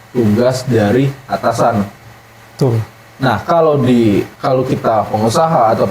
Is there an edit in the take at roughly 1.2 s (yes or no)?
no